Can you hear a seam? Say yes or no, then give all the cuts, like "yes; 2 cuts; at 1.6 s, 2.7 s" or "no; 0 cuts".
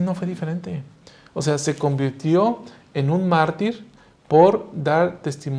no; 0 cuts